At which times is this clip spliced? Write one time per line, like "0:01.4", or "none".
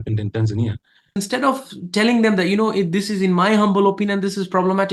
0:01.2

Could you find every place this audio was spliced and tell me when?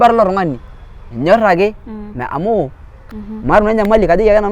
0:03.0

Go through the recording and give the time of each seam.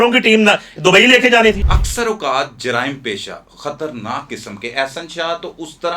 0:01.6

